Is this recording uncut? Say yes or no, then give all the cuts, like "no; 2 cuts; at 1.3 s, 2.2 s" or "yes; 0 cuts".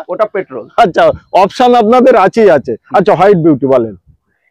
yes; 0 cuts